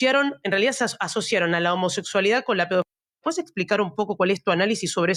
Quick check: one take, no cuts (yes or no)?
yes